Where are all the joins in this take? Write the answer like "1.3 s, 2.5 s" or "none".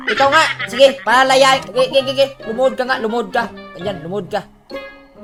none